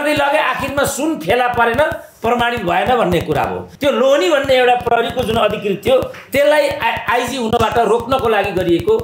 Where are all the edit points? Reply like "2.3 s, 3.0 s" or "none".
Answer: 3.7 s